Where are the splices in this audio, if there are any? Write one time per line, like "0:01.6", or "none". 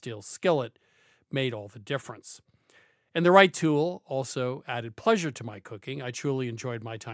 none